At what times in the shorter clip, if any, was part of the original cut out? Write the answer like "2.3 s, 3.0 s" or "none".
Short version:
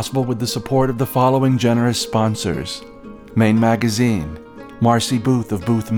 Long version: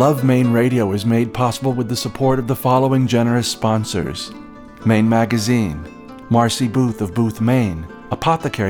none